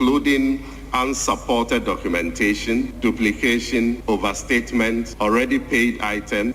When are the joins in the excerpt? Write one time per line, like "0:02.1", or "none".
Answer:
0:02.9
0:04.0
0:05.1

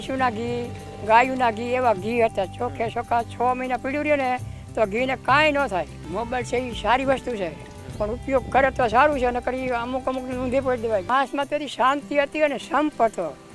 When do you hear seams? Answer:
0:06.0
0:11.1

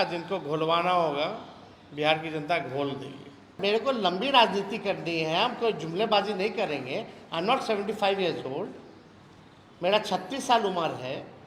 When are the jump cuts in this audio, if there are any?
0:03.5

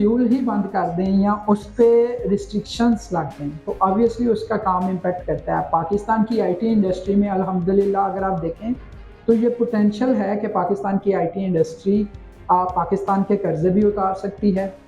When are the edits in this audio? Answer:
none

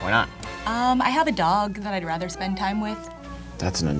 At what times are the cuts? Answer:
none

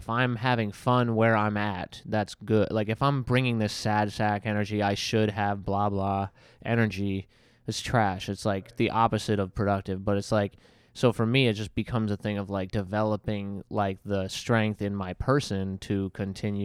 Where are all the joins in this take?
none

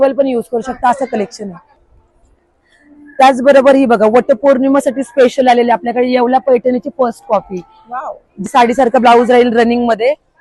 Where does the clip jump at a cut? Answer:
0:01.7
0:08.5

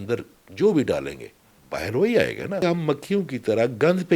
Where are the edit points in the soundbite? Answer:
0:02.6

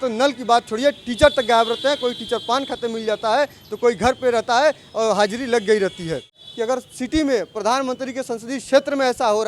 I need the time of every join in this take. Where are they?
0:06.5

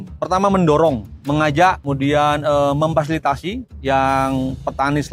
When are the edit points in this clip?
0:01.1
0:01.8
0:03.7

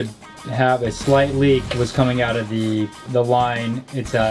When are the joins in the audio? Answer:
0:01.6
0:03.0

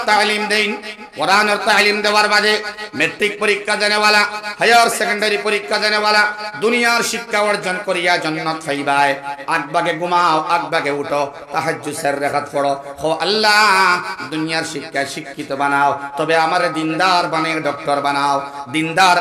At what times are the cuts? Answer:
none

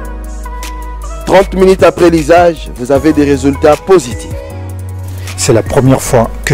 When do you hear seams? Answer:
0:01.0

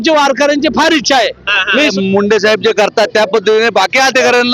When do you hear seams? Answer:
0:01.9

